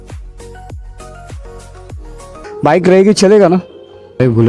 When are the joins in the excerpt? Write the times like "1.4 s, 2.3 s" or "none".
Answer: 2.5 s